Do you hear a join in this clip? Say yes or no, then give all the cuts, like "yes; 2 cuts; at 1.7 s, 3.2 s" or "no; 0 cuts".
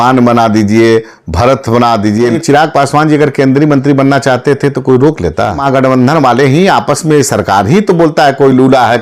yes; 2 cuts; at 2.4 s, 5.6 s